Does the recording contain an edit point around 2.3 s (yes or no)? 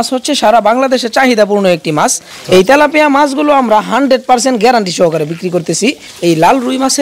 yes